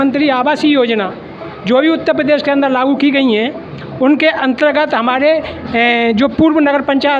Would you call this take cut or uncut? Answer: uncut